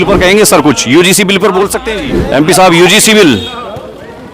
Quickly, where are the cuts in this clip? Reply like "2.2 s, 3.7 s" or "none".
1.8 s